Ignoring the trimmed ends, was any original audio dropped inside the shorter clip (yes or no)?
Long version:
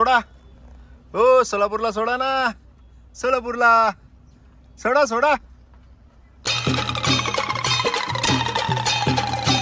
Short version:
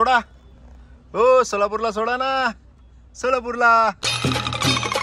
yes